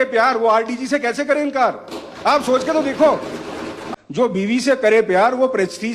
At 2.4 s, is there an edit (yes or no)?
no